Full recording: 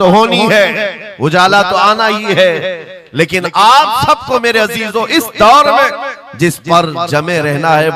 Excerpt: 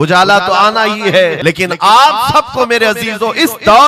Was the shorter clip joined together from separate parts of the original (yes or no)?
yes